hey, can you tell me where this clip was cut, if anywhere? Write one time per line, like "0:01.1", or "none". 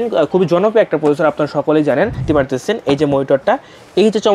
0:02.2